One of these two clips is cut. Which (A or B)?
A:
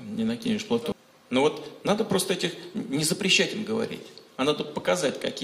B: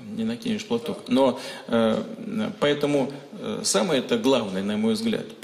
A